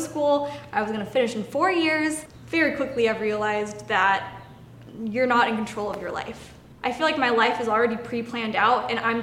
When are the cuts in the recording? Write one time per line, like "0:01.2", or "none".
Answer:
0:02.3
0:06.7